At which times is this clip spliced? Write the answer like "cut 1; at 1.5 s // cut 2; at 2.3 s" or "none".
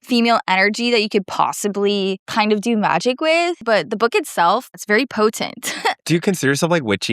cut 1; at 2.2 s // cut 2; at 3.6 s // cut 3; at 4.8 s // cut 4; at 6.0 s